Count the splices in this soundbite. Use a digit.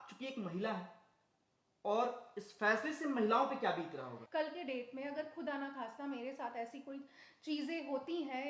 1